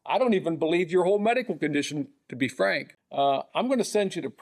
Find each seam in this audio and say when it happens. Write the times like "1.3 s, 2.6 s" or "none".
2.9 s